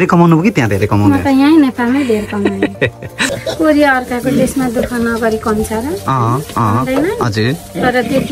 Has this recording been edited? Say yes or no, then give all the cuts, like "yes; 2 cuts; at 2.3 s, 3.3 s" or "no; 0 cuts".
yes; 1 cut; at 3.2 s